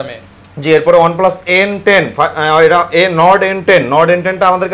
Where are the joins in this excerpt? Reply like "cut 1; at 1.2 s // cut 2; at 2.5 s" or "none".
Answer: none

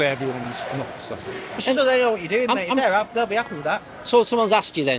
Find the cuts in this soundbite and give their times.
cut 1; at 1.4 s

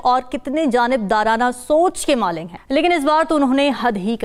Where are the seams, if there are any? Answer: none

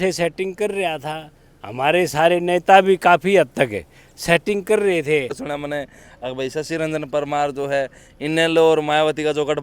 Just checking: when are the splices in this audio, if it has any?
cut 1; at 5.4 s

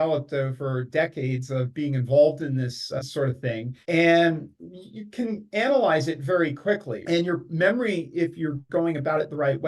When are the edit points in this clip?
cut 1; at 6.9 s

